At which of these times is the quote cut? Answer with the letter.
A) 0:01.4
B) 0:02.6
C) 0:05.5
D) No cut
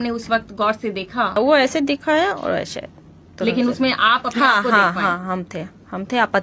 A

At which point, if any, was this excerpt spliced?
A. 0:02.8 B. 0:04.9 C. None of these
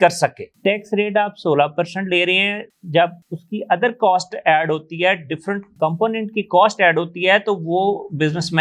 A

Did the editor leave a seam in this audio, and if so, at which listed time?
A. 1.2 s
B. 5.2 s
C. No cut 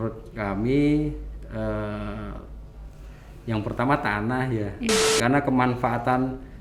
B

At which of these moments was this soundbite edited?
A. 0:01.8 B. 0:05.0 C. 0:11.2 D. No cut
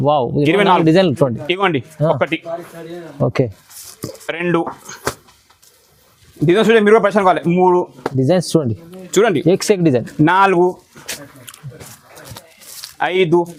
D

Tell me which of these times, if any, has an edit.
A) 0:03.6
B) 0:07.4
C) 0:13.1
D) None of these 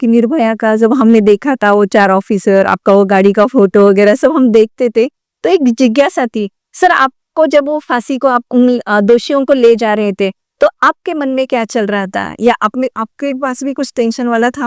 D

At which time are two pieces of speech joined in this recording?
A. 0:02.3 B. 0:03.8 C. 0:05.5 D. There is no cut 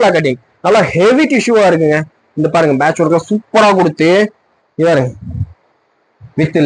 D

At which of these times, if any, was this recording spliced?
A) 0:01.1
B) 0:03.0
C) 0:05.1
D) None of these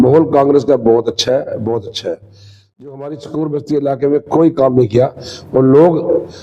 B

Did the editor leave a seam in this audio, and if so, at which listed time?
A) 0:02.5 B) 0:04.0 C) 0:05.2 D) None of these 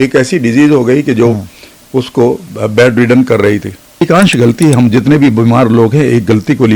B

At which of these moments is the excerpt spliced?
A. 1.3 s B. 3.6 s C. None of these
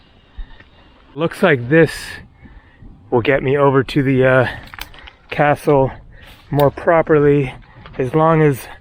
A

